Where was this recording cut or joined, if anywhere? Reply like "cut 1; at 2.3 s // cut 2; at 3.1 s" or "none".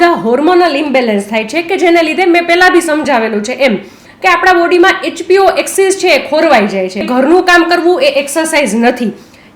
cut 1; at 7.0 s